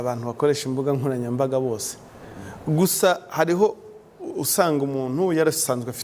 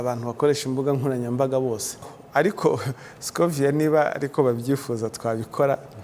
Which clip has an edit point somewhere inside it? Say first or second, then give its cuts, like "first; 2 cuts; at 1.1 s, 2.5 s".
second; 1 cut; at 2.2 s